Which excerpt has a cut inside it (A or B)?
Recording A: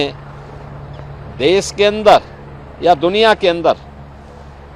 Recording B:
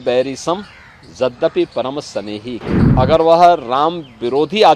B